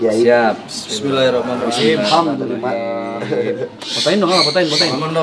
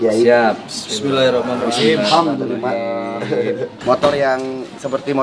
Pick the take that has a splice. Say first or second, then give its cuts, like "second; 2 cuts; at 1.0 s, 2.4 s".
second; 1 cut; at 3.8 s